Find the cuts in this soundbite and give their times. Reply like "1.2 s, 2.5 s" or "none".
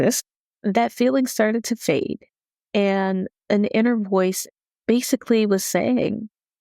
4.4 s